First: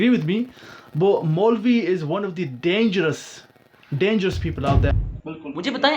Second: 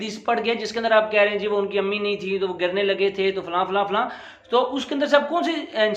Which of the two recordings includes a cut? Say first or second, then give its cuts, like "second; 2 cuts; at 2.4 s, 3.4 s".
first; 1 cut; at 4.9 s